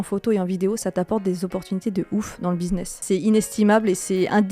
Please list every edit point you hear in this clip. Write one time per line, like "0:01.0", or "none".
0:03.0